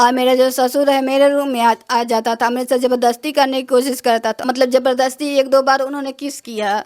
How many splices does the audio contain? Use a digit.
1